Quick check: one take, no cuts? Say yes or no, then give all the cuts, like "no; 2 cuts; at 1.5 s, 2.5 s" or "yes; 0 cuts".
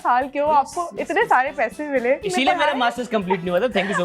no; 1 cut; at 2.3 s